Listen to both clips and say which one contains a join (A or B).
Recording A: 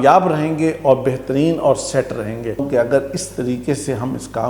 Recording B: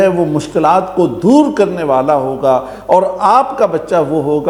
A